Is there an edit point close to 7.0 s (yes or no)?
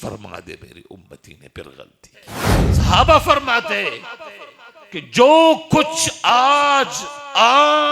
no